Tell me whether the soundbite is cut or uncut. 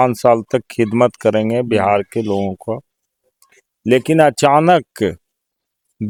uncut